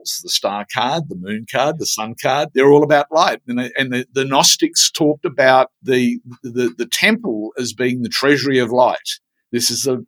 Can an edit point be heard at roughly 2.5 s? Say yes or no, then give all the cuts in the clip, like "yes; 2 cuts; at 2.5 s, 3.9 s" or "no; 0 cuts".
yes; 2 cuts; at 2.5 s, 5.8 s